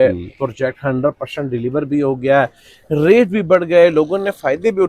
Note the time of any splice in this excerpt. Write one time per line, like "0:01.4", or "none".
none